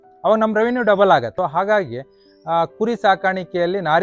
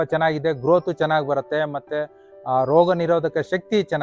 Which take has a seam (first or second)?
first